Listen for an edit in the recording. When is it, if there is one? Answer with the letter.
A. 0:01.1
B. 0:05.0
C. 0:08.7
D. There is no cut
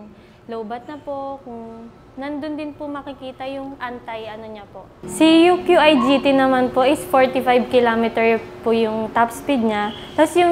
B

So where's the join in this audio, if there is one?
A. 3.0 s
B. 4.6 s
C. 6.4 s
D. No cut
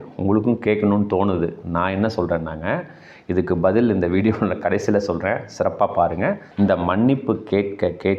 C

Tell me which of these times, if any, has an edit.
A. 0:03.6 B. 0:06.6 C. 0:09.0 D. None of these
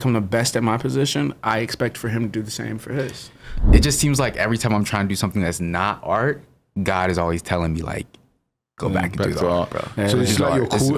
A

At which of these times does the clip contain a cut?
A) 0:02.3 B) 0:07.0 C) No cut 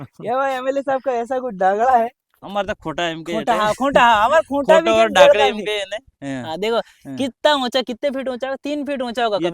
A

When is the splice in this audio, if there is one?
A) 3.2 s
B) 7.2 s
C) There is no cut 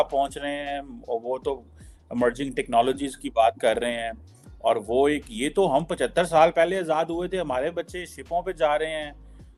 C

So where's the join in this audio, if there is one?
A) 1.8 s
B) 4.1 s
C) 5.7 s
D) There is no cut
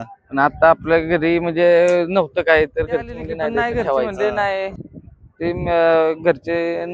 B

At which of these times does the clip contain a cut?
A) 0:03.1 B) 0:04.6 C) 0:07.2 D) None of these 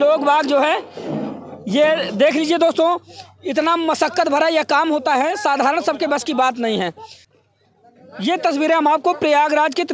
C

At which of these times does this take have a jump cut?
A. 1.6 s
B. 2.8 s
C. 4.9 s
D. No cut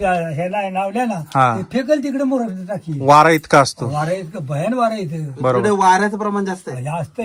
D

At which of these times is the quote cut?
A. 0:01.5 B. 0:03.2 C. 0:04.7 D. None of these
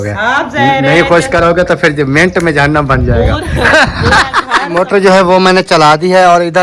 C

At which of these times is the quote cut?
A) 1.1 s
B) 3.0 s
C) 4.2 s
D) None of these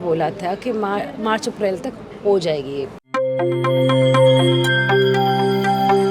B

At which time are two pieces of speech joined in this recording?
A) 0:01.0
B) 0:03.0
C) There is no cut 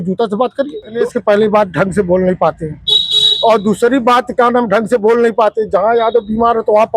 A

